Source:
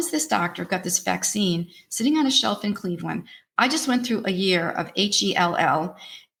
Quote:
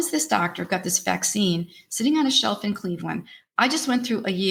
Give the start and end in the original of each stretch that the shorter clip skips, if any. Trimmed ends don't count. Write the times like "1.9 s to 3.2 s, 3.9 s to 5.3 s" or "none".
none